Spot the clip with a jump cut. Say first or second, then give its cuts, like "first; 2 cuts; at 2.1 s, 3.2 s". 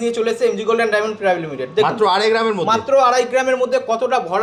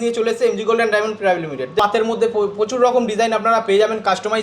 second; 1 cut; at 1.8 s